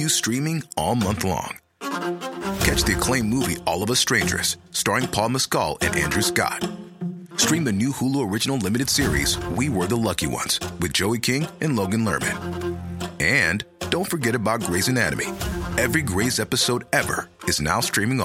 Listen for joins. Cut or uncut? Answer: uncut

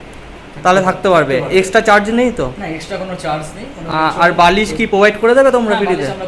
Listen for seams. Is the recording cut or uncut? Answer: uncut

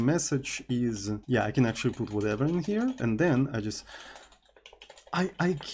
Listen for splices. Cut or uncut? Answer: cut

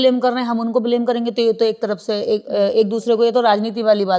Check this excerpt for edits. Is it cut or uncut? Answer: uncut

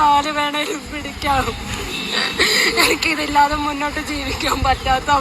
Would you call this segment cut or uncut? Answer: uncut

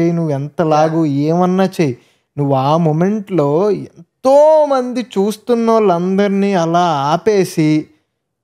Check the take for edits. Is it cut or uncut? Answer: uncut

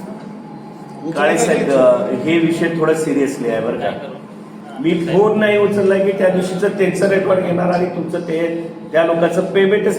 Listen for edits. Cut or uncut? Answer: uncut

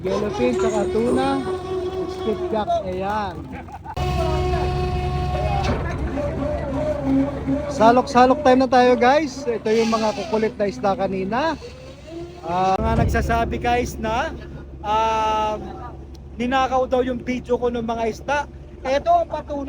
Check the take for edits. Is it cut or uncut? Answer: cut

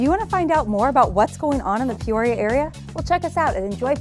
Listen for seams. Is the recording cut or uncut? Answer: uncut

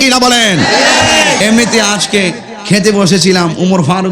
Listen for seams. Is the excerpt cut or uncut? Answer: cut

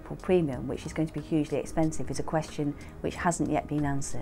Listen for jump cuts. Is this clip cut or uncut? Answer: uncut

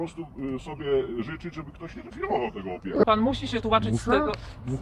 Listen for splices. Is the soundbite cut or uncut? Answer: cut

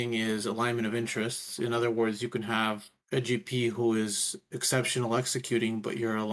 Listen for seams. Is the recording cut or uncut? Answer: cut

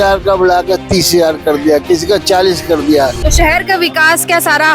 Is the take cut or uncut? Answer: cut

